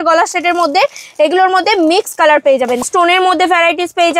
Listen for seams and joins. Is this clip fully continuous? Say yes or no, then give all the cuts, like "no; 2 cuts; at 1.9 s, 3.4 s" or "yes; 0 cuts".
no; 1 cut; at 2.8 s